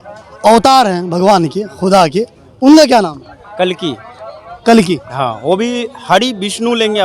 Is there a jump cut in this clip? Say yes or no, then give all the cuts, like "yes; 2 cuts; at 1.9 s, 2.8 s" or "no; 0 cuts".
no; 0 cuts